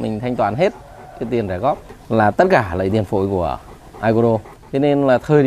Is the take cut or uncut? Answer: cut